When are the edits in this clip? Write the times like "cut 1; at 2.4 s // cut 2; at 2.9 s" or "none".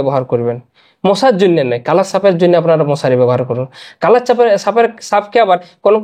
none